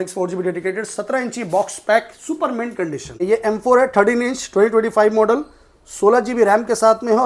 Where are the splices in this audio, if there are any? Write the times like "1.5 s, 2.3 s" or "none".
3.2 s